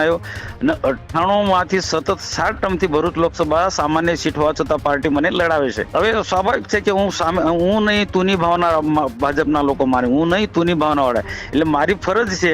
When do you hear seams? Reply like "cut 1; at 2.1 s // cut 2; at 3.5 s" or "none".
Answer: cut 1; at 5.9 s

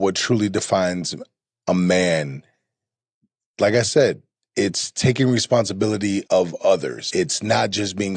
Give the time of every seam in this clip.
cut 1; at 6.2 s // cut 2; at 7.0 s

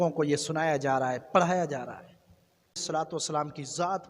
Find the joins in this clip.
cut 1; at 2.8 s

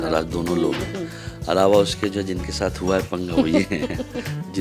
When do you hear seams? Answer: none

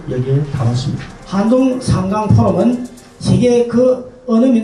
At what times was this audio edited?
cut 1; at 1.1 s

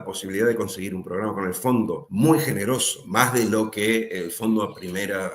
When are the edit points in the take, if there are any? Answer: cut 1; at 2.0 s // cut 2; at 3.0 s

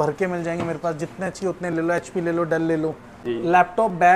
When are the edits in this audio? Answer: cut 1; at 3.1 s

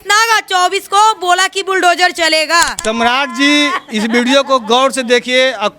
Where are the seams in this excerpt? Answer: cut 1; at 2.8 s

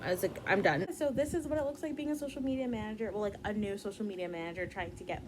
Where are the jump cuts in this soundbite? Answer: cut 1; at 0.9 s

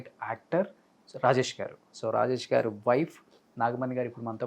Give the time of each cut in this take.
cut 1; at 1.9 s

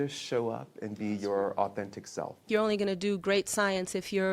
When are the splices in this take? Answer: cut 1; at 2.5 s

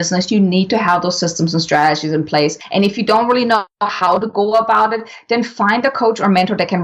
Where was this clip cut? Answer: cut 1; at 2.6 s

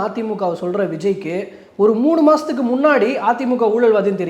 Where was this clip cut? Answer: none

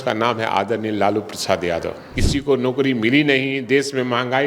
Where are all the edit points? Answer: cut 1; at 2.1 s

